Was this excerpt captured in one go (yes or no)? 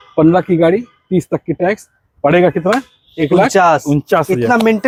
yes